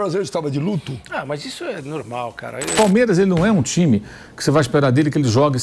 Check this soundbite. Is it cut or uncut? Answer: cut